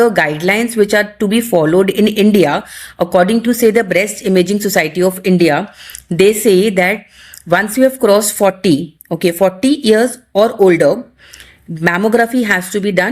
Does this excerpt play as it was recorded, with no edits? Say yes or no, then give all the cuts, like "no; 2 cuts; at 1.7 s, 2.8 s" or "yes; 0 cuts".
yes; 0 cuts